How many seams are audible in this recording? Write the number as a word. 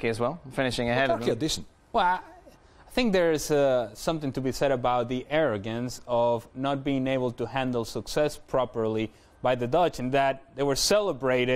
one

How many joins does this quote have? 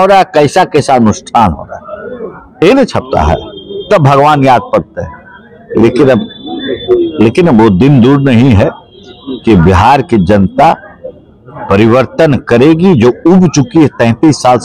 zero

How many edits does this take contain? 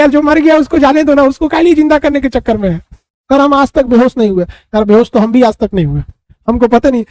one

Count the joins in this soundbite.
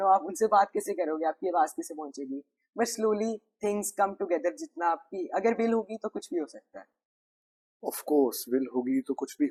zero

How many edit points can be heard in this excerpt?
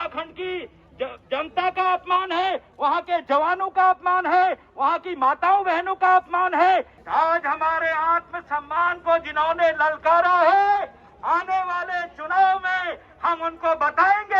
one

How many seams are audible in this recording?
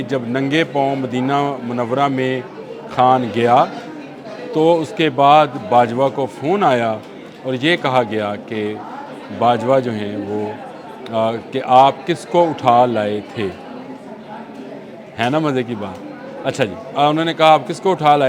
zero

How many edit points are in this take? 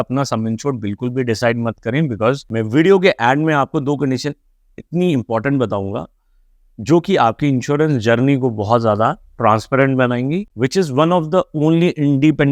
two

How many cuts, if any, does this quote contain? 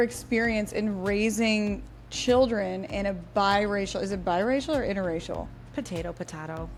zero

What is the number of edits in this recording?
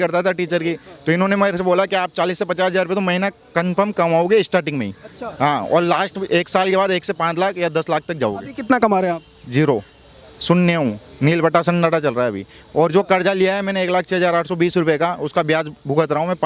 zero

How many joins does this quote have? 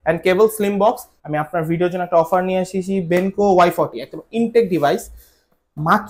one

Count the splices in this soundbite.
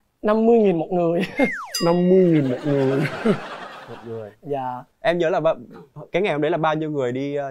zero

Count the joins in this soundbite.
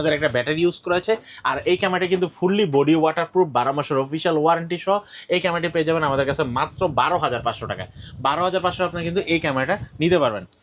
zero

